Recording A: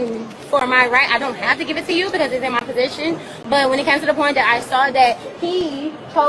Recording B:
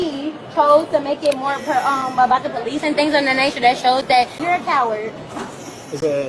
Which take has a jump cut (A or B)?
B